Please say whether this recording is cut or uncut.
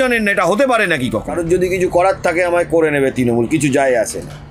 cut